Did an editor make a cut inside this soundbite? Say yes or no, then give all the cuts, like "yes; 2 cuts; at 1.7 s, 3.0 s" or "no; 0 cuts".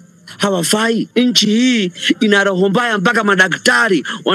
yes; 1 cut; at 1.1 s